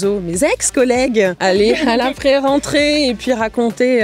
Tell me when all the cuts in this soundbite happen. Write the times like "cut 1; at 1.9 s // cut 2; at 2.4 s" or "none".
cut 1; at 1.4 s